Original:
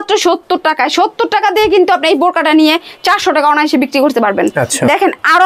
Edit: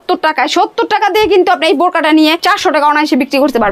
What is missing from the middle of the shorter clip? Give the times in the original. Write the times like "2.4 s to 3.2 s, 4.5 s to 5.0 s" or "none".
2.8 s to 3.0 s

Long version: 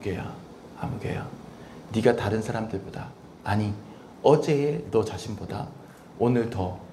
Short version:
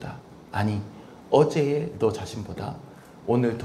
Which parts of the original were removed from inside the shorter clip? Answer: none

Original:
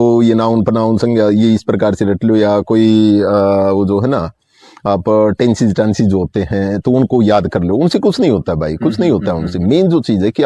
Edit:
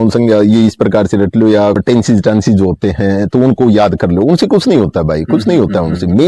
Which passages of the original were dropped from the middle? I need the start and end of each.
2.7 s to 5.3 s

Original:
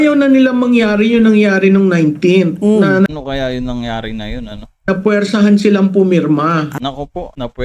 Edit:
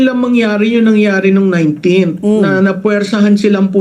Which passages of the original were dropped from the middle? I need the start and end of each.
3.1 s to 4.9 s

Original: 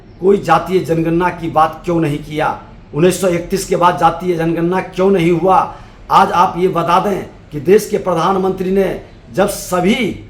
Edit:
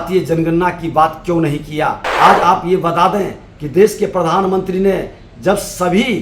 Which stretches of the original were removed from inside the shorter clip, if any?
2.6 s to 6.0 s

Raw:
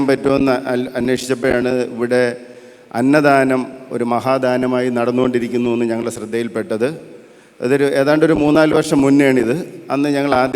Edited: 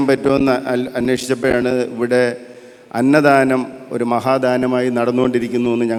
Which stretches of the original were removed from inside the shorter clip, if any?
none

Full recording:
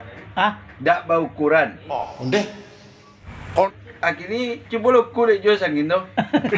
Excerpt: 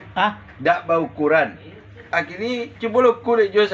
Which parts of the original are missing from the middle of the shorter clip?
2.0 s to 3.7 s

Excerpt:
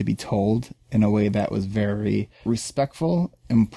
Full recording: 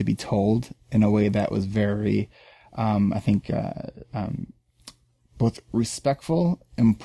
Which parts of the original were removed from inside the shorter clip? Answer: 2.3 s to 5.6 s

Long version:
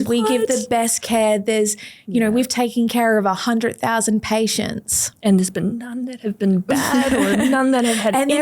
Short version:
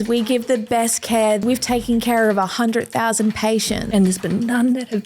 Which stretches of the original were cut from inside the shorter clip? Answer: 1.4 s to 2.3 s, 4.7 s to 5.2 s

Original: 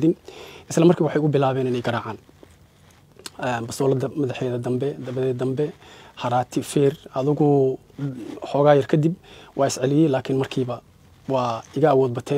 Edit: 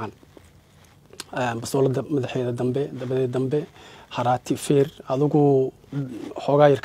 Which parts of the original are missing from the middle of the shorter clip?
none

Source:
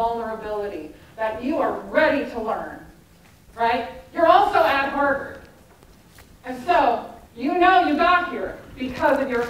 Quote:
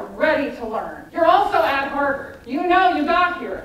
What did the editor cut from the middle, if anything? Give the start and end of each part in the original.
2.7 s to 4.0 s, 5.3 s to 7.2 s

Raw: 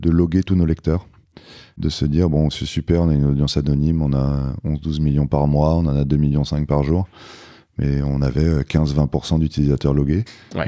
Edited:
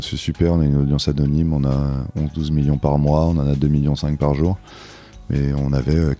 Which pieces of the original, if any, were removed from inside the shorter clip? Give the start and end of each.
none

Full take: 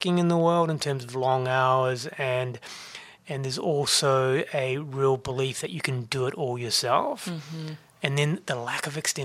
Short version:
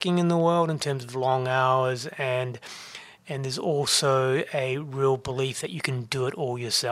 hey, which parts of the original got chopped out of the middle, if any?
none

